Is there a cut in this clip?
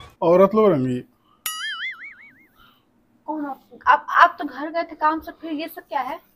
no; 0 cuts

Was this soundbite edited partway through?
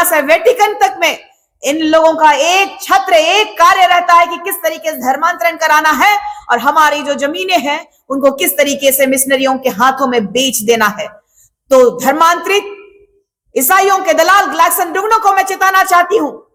no; 0 cuts

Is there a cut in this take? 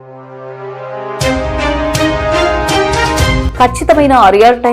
yes; 1 cut; at 3.4 s

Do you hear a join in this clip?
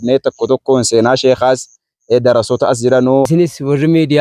yes; 1 cut; at 3.3 s

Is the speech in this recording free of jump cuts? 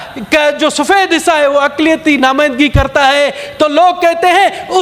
yes; 0 cuts

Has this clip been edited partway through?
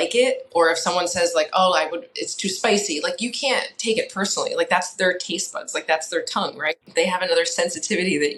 yes; 1 cut; at 6.8 s

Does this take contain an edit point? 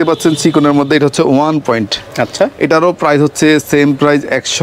no; 0 cuts

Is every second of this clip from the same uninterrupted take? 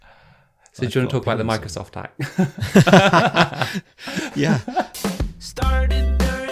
no; 1 cut; at 4.9 s

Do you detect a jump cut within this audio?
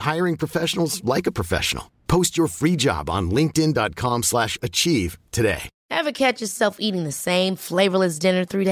yes; 1 cut; at 5.7 s

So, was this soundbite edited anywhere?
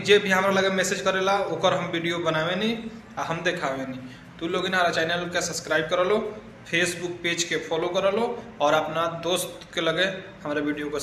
yes; 1 cut; at 4.4 s

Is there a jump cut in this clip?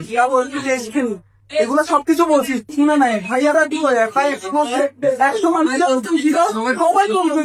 no; 0 cuts

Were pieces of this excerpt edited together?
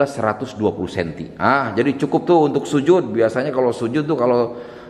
no; 0 cuts

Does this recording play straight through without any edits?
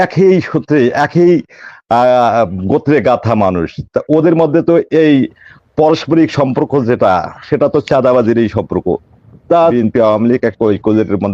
no; 1 cut; at 9.7 s

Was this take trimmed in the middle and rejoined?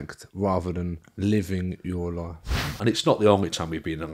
yes; 1 cut; at 2.7 s

